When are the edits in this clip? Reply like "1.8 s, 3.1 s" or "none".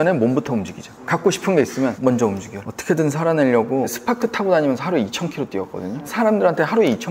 none